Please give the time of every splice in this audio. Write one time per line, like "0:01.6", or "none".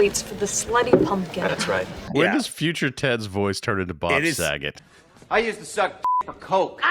0:02.0